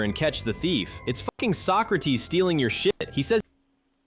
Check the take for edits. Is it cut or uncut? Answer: uncut